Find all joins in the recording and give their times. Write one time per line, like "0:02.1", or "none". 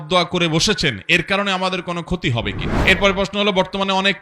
0:02.7

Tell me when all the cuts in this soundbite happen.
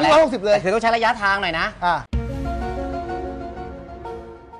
none

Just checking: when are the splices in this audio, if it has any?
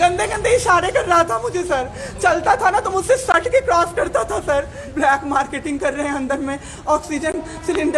0:04.8

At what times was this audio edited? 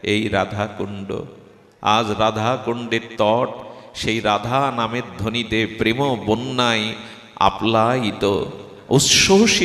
none

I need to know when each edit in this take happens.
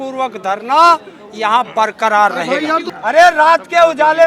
0:02.8

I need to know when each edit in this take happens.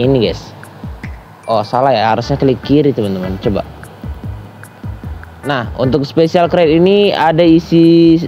none

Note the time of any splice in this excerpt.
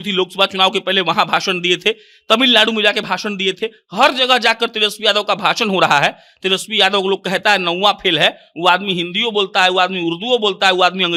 none

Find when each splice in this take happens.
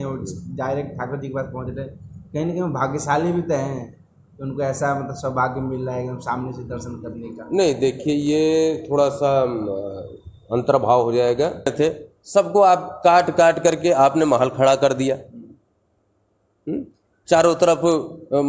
0:11.7

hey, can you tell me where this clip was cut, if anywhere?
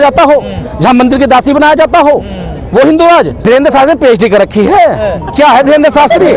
0:03.4

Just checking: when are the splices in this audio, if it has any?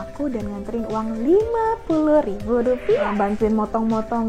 0:03.0

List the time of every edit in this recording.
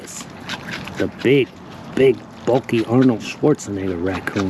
none

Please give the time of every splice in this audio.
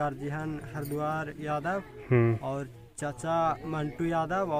none

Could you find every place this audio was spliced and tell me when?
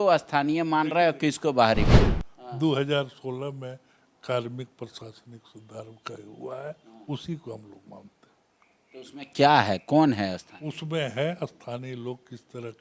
0:02.0

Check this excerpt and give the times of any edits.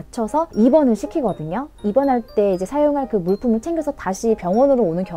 0:01.8

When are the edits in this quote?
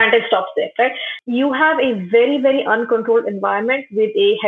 0:01.1

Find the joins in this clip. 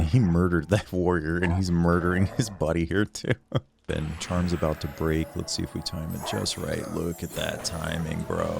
0:03.8

